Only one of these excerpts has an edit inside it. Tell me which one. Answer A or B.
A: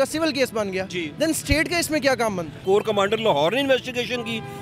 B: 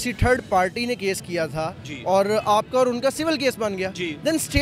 A